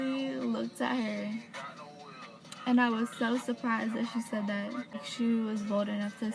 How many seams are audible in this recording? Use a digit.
1